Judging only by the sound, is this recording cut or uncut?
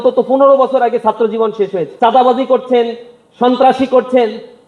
cut